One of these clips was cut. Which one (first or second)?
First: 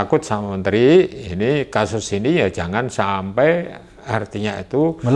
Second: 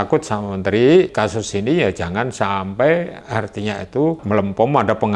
second